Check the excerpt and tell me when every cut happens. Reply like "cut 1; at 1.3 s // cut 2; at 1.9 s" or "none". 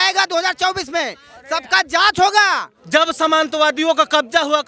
cut 1; at 2.7 s